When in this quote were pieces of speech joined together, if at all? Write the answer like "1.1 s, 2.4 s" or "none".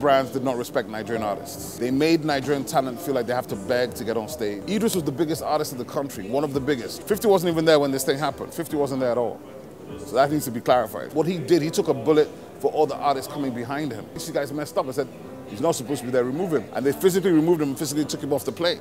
1.6 s, 4.6 s, 6.9 s, 11.0 s, 14.2 s, 16.7 s